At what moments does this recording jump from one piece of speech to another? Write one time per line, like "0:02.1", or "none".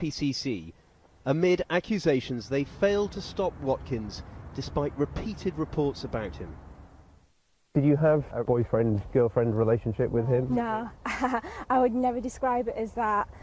0:02.4